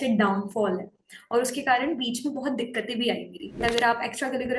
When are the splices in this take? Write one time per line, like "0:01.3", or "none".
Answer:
0:03.6